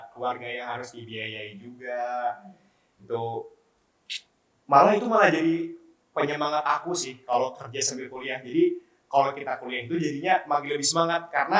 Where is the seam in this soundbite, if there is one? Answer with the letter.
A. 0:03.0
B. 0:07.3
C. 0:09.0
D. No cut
D